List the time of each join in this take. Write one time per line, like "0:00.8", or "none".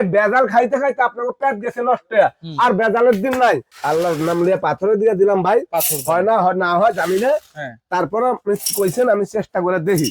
0:03.7